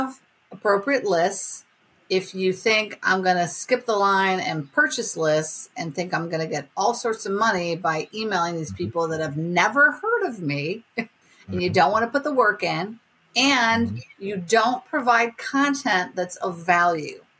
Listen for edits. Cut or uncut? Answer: uncut